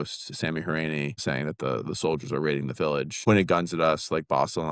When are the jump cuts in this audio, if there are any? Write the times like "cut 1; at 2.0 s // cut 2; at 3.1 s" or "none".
cut 1; at 1.2 s // cut 2; at 3.2 s